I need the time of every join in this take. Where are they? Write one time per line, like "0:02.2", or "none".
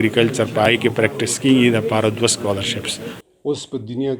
0:03.1